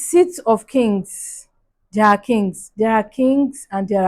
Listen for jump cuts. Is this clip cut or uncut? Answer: cut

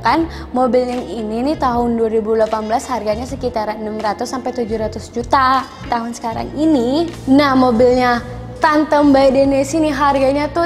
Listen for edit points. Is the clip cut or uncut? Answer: cut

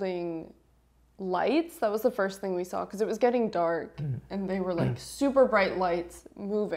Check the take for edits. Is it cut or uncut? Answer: uncut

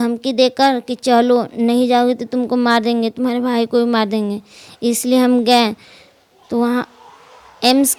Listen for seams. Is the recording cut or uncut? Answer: uncut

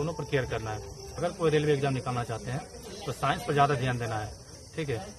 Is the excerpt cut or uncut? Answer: cut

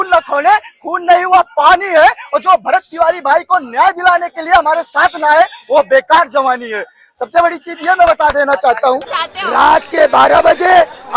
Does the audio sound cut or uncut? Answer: cut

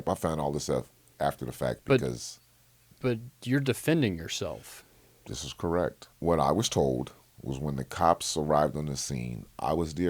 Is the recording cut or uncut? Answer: cut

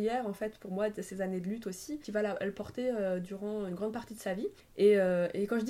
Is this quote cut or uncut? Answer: cut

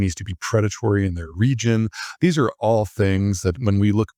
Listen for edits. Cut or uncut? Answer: uncut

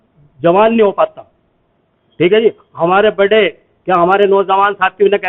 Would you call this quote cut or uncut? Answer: uncut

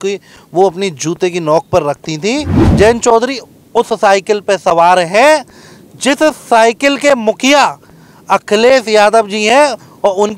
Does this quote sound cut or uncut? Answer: cut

